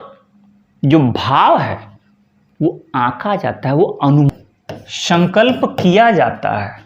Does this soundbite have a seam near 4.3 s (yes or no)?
yes